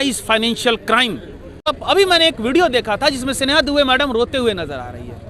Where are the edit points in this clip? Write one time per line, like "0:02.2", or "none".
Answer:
0:01.7